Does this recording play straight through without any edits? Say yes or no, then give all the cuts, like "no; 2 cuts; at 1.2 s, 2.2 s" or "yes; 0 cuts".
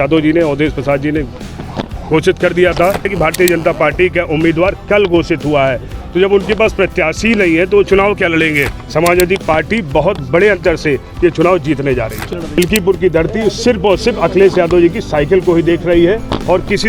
no; 3 cuts; at 3.1 s, 8.8 s, 12.2 s